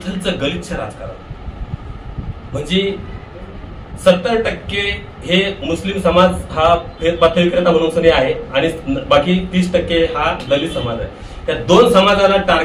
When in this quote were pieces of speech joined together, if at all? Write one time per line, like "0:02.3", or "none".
none